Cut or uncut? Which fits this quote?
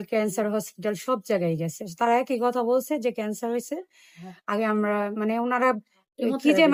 uncut